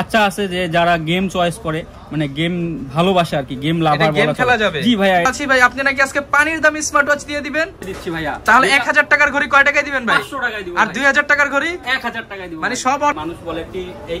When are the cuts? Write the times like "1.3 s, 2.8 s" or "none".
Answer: 5.3 s, 7.8 s, 13.1 s